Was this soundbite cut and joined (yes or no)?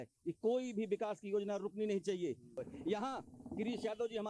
yes